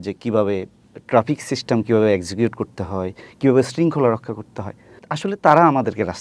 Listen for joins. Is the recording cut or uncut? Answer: cut